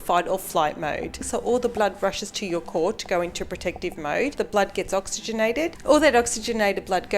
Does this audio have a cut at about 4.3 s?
yes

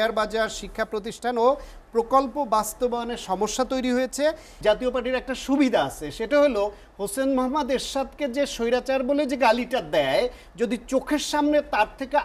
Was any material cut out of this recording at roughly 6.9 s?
no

